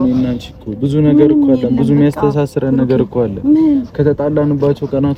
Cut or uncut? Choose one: uncut